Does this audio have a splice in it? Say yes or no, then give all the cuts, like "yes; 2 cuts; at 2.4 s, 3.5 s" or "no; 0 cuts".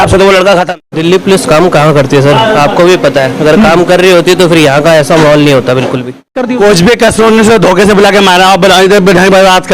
yes; 2 cuts; at 1.0 s, 6.3 s